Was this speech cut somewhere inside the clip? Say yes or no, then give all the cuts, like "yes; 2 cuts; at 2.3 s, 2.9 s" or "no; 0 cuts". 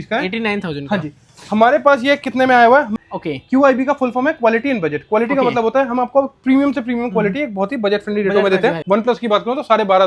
yes; 2 cuts; at 2.9 s, 8.8 s